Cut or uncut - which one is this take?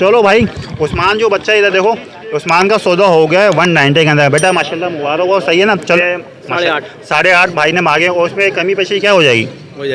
cut